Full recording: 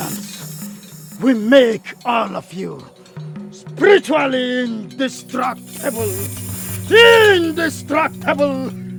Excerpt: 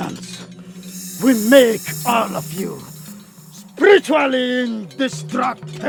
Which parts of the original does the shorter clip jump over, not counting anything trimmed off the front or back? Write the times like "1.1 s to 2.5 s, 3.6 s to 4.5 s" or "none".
none